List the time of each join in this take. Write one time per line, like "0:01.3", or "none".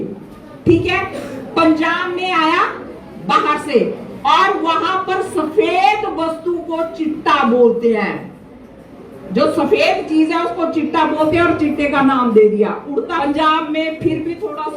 0:13.2